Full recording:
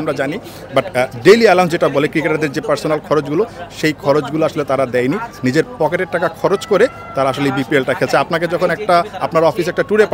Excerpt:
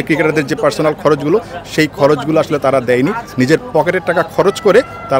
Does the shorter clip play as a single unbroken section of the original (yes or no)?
yes